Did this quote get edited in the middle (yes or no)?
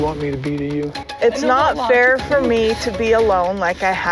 yes